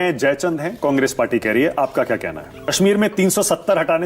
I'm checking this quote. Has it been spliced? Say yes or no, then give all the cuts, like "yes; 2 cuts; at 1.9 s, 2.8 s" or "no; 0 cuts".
yes; 1 cut; at 2.6 s